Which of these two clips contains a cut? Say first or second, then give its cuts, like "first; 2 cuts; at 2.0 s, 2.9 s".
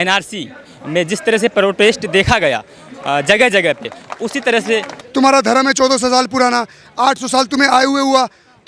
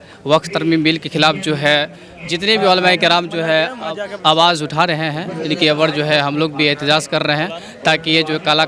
first; 1 cut; at 4.9 s